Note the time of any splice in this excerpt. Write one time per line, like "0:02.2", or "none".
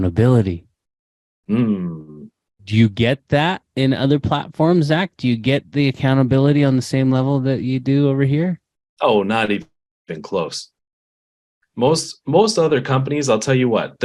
0:02.6